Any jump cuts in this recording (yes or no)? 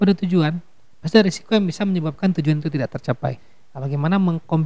yes